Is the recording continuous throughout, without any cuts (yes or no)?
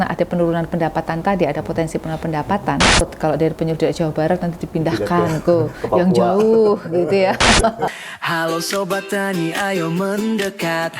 no